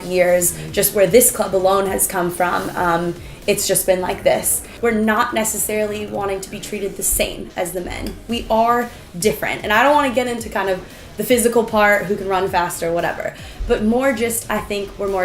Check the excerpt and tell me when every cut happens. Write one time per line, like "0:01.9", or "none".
0:04.6